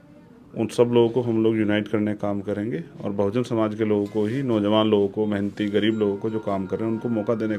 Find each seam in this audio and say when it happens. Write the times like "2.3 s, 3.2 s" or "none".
none